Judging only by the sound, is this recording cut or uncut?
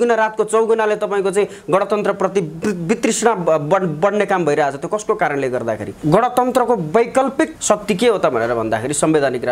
cut